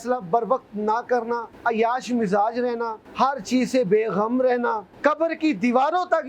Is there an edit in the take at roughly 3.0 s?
yes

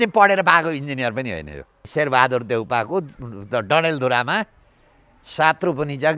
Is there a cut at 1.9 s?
yes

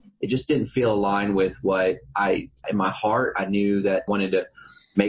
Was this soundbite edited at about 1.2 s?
no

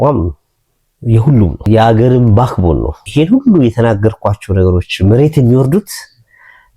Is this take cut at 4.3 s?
no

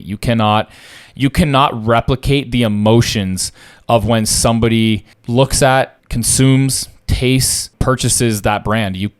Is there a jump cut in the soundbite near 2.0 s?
no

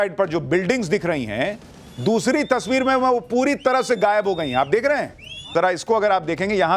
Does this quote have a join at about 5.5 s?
yes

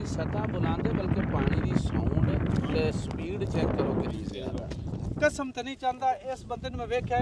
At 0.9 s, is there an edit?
no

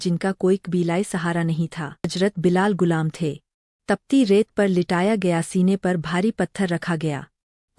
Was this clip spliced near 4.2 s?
no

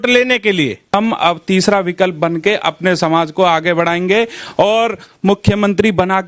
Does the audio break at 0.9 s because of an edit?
yes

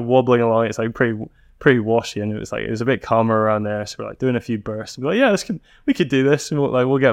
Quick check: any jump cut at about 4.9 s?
no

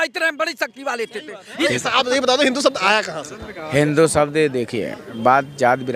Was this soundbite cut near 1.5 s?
yes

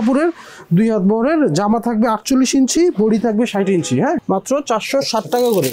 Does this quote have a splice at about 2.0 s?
no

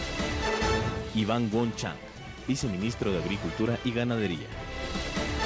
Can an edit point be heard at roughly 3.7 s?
no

